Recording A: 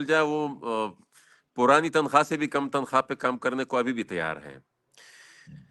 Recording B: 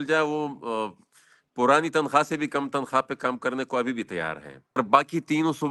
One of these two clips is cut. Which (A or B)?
B